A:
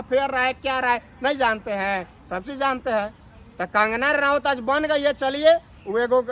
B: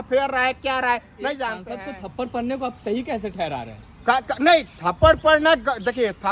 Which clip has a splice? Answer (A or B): B